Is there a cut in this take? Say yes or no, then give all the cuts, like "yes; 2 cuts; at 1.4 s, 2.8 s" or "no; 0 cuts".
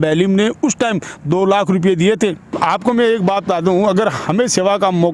yes; 1 cut; at 2.6 s